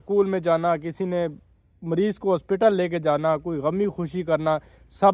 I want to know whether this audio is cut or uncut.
uncut